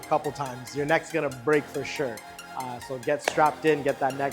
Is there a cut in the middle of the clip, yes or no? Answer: no